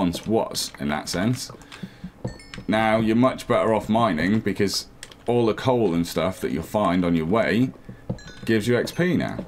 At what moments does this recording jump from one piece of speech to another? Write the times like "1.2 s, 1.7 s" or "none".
none